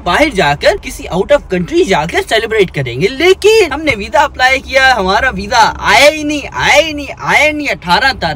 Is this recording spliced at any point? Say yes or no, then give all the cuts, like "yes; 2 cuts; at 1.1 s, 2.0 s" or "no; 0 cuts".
no; 0 cuts